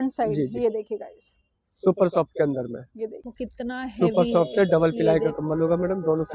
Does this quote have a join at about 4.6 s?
no; 1 cut; at 3.2 s

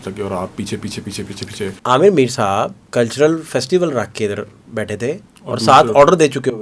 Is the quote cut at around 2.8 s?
yes; 3 cuts; at 1.8 s, 2.8 s, 5.3 s

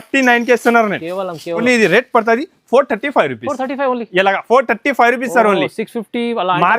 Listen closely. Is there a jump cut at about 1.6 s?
yes; 1 cut; at 1.6 s

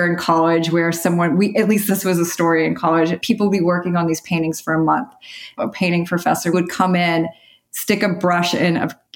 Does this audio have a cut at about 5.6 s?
yes; 4 cuts; at 1.8 s, 3.2 s, 5.6 s, 6.5 s

